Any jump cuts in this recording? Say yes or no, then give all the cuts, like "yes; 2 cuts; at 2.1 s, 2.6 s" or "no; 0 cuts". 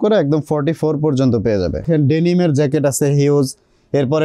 yes; 1 cut; at 1.9 s